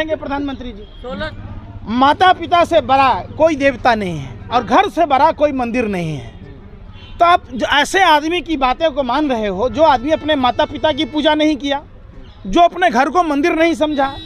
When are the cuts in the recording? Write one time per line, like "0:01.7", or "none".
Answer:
0:01.4